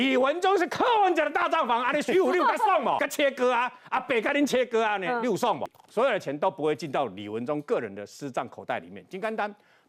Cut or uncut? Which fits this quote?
cut